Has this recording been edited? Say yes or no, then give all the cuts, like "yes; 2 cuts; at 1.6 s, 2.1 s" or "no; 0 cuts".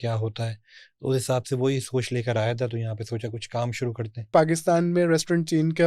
yes; 1 cut; at 4.3 s